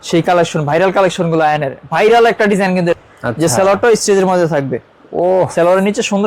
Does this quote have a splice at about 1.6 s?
no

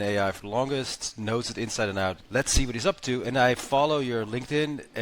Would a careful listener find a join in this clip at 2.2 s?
yes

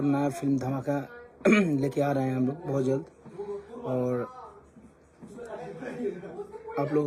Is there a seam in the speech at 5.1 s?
no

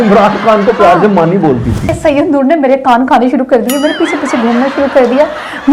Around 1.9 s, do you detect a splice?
yes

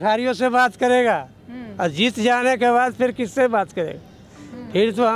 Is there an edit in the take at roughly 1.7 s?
no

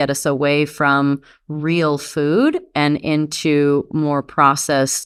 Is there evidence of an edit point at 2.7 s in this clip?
no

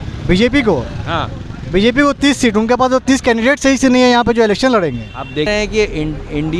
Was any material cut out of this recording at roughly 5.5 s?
yes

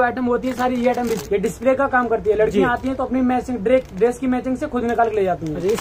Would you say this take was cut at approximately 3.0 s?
no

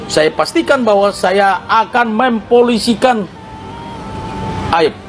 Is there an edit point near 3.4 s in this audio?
no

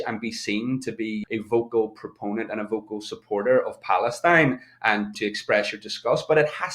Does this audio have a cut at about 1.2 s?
yes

